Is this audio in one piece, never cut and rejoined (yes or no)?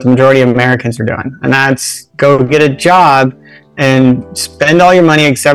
yes